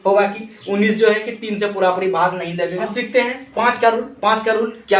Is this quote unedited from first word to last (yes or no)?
no